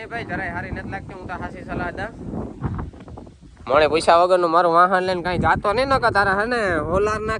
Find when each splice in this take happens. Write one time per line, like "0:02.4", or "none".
0:03.0

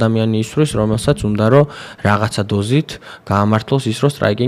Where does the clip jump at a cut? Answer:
none

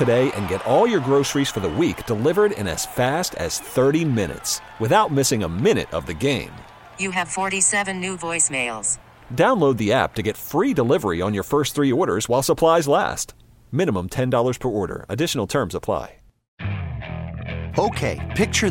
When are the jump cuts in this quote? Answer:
0:16.5

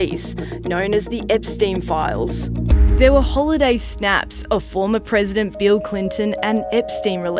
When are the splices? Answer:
0:02.7

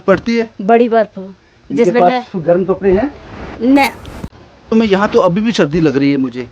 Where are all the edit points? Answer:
0:04.7

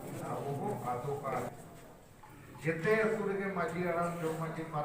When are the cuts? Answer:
0:01.5

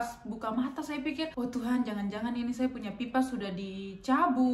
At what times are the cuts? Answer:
0:01.3

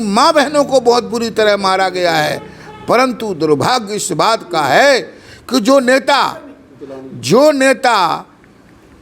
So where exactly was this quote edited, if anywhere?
none

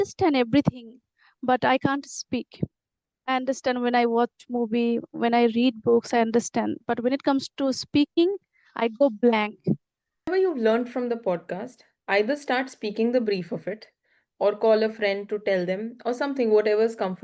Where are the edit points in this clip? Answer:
0:10.3

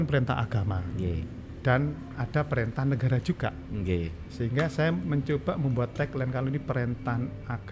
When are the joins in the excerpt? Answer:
none

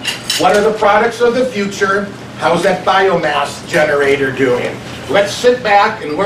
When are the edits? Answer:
0:03.0

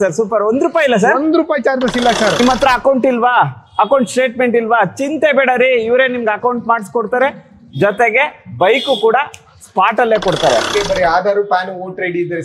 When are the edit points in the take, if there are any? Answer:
0:02.4
0:10.7

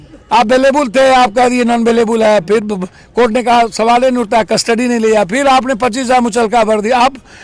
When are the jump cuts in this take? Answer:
none

